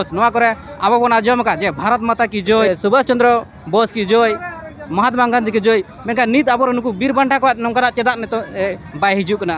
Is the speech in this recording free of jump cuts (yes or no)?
no